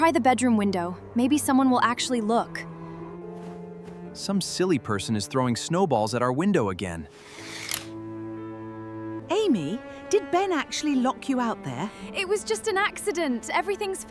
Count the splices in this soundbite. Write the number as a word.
zero